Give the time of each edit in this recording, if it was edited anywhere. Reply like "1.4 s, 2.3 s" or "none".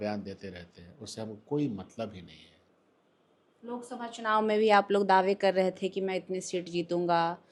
none

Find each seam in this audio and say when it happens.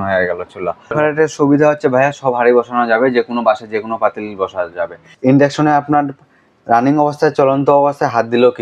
0.9 s, 5.1 s

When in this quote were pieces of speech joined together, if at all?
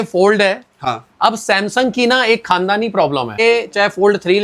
3.4 s

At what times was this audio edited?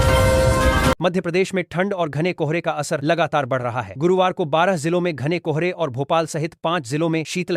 0.9 s

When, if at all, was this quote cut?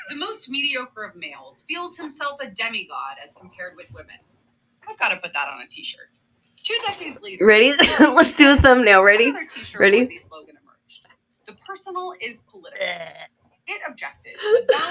none

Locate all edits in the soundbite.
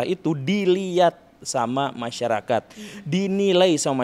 none

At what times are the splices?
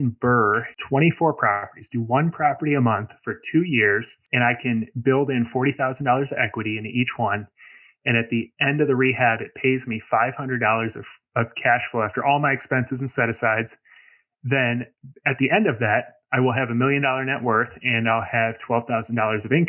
none

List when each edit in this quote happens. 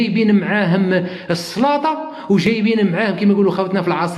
none

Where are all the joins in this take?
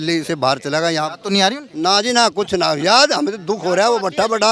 none

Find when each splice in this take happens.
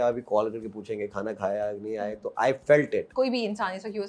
3.1 s

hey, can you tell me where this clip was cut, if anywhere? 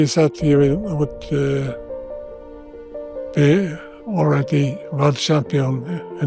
none

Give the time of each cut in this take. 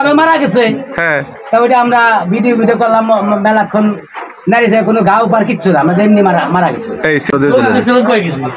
7.3 s

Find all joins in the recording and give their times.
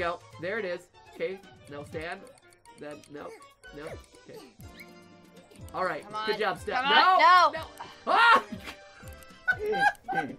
none

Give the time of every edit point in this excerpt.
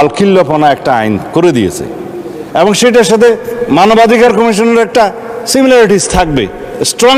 none

